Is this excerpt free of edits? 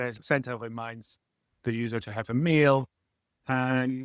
yes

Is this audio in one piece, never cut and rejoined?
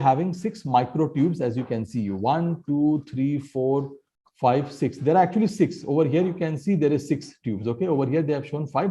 yes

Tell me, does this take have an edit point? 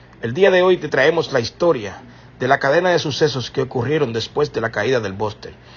no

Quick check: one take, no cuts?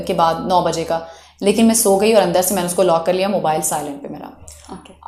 yes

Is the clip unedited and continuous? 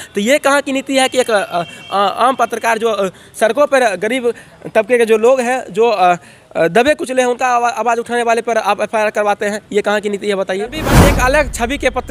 no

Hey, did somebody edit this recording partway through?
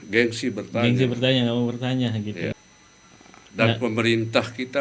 yes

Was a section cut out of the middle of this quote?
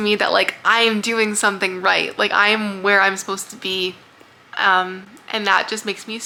no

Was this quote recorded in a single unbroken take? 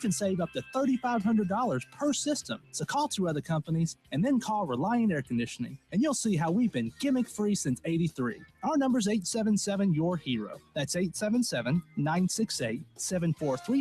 yes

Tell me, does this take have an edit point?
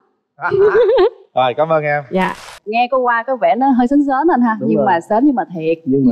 yes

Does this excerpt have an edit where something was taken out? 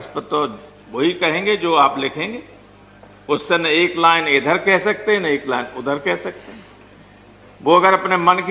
no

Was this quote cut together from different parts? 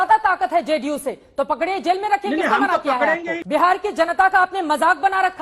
yes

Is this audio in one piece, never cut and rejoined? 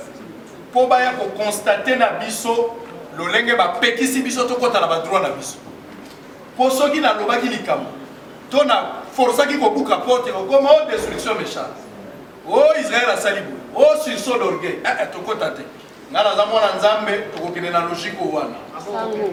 yes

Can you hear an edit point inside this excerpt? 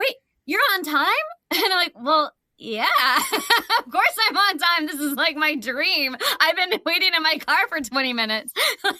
no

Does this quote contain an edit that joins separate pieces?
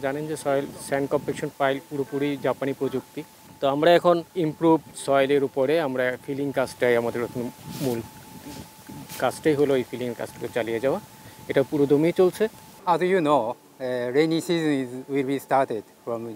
no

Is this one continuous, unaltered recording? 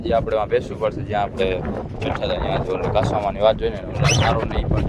yes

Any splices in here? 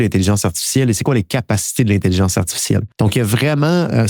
yes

